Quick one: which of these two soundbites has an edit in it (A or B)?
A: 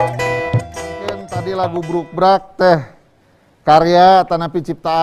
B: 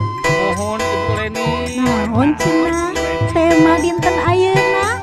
A